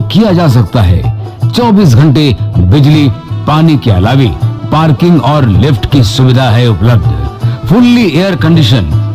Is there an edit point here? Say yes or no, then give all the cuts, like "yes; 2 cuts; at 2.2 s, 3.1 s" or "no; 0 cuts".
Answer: no; 0 cuts